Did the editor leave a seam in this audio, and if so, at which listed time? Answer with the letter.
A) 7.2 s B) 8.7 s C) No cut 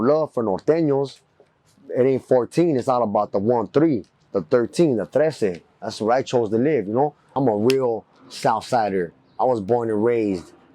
A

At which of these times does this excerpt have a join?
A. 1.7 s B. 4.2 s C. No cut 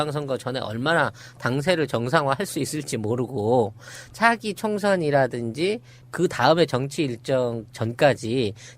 A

